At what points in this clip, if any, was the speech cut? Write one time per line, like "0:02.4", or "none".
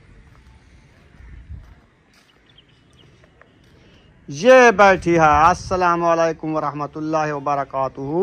none

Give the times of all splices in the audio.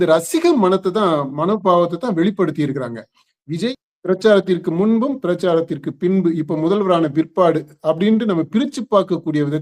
0:03.7

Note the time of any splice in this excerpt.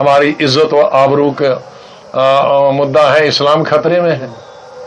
none

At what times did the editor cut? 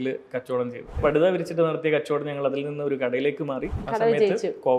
0:01.0
0:03.8

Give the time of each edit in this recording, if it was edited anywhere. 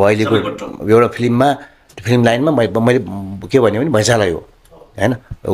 none

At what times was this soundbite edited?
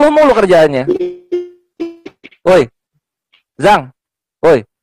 none

